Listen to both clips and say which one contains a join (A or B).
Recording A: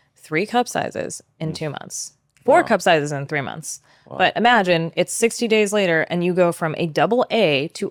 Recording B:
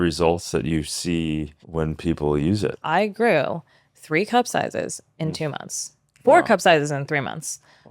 B